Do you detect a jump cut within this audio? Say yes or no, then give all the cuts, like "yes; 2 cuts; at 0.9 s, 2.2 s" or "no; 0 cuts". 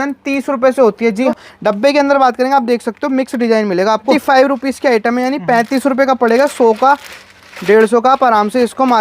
yes; 2 cuts; at 1.3 s, 4.1 s